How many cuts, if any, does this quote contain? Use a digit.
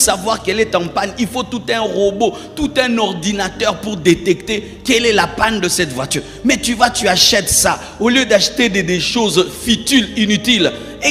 0